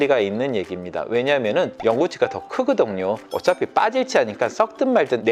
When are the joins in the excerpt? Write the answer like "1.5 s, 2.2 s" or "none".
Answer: 3.2 s